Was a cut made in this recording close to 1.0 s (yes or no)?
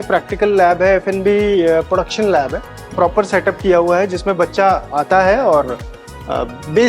no